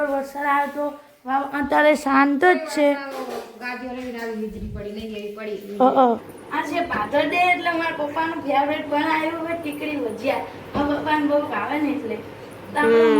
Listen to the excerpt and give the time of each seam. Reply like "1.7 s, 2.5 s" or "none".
6.4 s